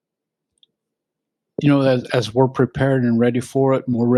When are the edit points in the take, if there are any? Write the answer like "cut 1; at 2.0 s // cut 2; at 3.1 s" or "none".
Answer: none